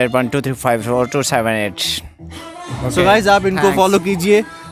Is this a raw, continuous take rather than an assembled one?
yes; 0 cuts

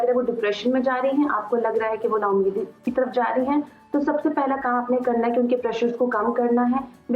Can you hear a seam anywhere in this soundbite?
no; 0 cuts

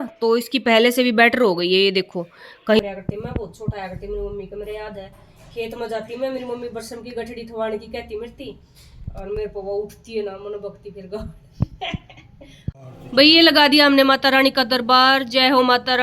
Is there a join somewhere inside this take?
yes; 2 cuts; at 2.8 s, 12.7 s

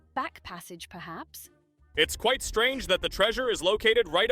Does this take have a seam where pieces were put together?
yes; 1 cut; at 1.8 s

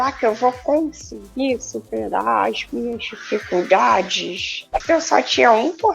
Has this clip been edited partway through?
yes; 1 cut; at 4.7 s

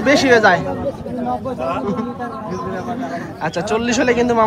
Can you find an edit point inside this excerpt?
no; 0 cuts

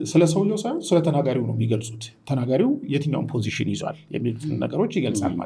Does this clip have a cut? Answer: no; 0 cuts

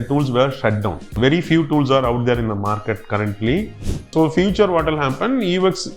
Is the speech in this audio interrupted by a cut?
yes; 1 cut; at 3.8 s

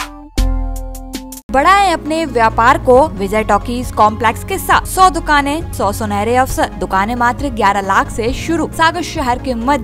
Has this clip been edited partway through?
yes; 6 cuts; at 1.5 s, 3.2 s, 4.9 s, 5.7 s, 6.8 s, 8.7 s

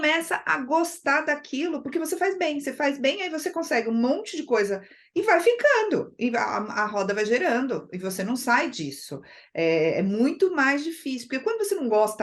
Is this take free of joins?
yes; 0 cuts

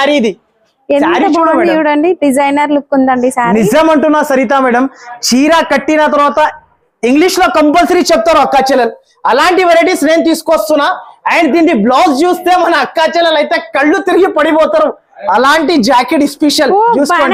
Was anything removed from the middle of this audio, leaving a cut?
no; 0 cuts

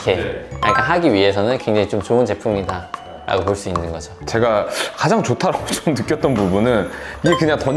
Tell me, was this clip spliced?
yes; 1 cut; at 4.2 s

